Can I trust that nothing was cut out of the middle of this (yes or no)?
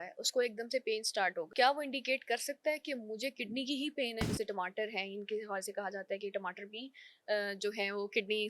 no